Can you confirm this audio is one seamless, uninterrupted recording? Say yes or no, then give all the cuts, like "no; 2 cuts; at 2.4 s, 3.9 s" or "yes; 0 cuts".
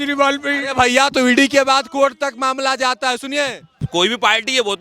no; 1 cut; at 3.9 s